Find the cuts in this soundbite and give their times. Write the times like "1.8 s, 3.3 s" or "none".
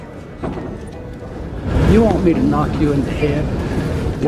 none